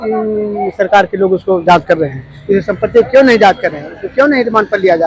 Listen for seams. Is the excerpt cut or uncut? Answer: uncut